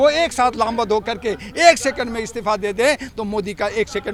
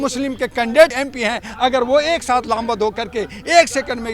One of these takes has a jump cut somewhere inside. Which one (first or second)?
second